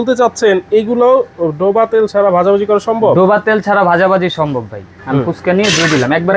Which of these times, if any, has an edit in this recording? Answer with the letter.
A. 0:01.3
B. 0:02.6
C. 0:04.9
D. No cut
C